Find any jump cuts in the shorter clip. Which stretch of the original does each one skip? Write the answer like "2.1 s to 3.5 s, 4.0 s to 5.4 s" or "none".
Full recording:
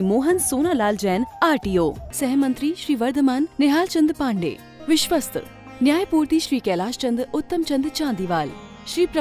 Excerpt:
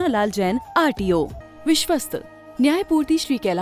2.1 s to 4.6 s